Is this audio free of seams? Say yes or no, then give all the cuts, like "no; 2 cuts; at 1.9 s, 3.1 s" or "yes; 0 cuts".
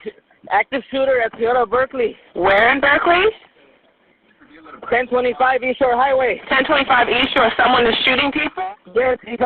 no; 1 cut; at 8.4 s